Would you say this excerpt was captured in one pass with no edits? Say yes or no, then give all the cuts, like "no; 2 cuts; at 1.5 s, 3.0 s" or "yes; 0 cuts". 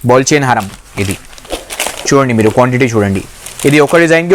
yes; 0 cuts